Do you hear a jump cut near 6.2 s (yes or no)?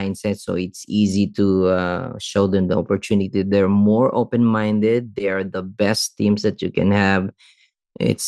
no